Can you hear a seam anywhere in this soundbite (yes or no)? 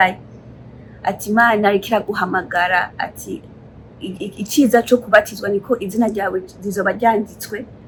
no